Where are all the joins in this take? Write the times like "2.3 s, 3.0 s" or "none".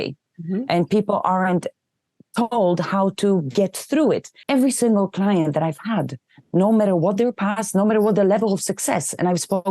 4.3 s